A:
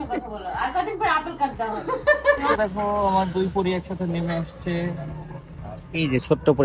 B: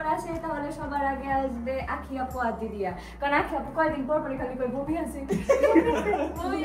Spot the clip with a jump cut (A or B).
A